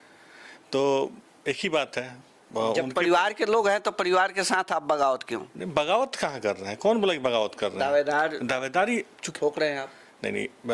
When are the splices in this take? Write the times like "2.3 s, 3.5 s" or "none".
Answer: none